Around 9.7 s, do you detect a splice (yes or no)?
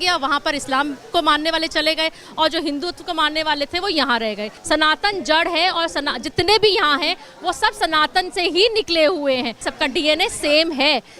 yes